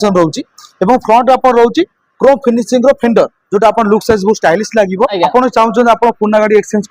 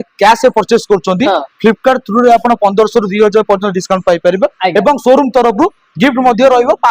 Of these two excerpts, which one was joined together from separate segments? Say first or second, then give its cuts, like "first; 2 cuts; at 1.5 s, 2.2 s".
first; 1 cut; at 5.1 s